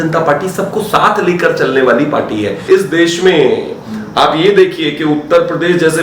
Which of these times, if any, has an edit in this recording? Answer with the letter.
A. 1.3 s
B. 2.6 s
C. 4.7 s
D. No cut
B